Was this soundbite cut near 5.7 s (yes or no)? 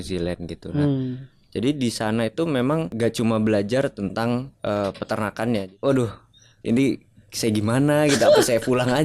yes